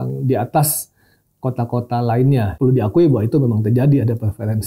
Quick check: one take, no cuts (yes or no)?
no